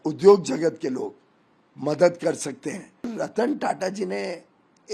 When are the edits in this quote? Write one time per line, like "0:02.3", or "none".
0:03.1